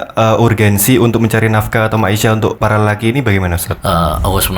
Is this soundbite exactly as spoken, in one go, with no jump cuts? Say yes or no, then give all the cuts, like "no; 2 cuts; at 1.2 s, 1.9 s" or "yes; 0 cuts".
no; 2 cuts; at 2.6 s, 3.7 s